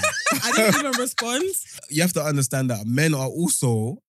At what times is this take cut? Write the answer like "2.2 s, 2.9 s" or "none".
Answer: 1.8 s